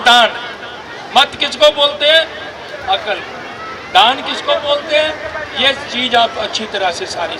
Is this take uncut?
yes; 0 cuts

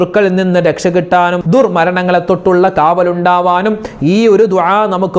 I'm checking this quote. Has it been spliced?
yes; 1 cut; at 1.4 s

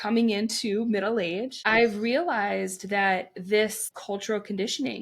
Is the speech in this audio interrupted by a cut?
yes; 2 cuts; at 1.6 s, 3.9 s

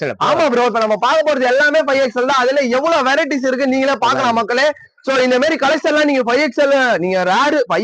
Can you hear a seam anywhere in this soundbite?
no; 0 cuts

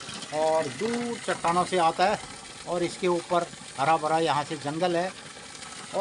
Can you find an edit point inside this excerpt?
no; 0 cuts

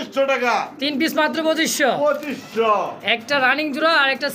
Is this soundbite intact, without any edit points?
yes; 0 cuts

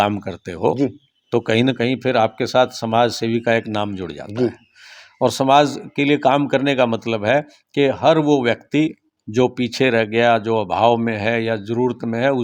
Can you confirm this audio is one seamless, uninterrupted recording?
yes; 0 cuts

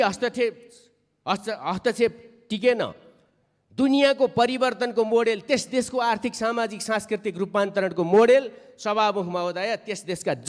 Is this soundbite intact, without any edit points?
yes; 0 cuts

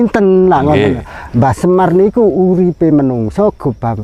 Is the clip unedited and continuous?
yes; 0 cuts

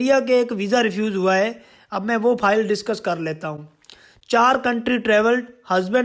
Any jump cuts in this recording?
no; 0 cuts

